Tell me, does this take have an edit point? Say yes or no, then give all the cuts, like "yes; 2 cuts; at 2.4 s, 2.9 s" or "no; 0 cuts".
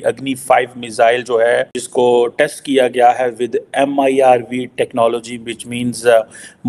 yes; 1 cut; at 1.8 s